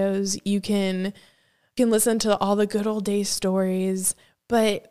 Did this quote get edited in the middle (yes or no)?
yes